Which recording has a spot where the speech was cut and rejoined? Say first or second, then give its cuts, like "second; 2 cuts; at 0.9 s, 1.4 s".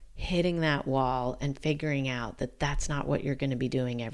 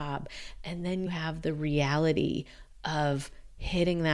second; 1 cut; at 1.1 s